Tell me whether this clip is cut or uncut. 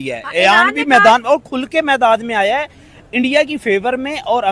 uncut